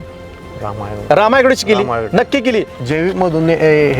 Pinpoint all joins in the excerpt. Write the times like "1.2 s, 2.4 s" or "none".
2.8 s